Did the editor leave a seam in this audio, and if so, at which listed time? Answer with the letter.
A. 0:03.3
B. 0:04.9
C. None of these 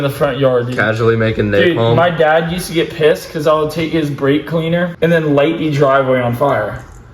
B